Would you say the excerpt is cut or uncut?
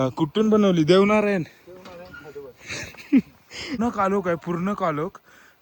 cut